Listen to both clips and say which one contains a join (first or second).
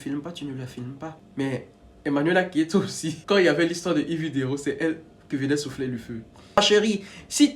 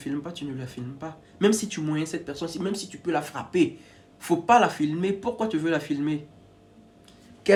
first